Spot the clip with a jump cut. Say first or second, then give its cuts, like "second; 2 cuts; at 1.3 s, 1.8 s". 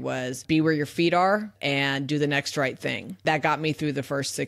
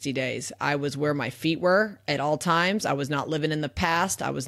first; 1 cut; at 3.2 s